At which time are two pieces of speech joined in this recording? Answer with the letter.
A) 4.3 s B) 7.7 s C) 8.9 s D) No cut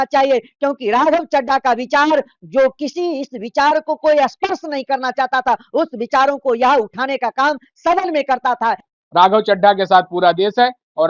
C